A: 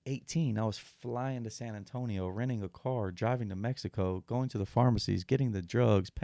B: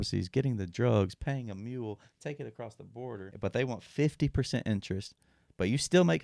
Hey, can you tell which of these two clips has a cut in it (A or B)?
B